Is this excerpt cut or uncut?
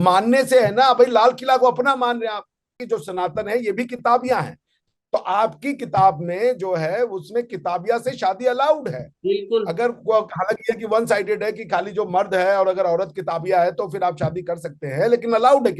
cut